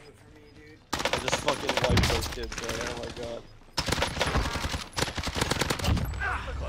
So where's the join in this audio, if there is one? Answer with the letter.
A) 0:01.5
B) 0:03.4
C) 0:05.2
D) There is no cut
D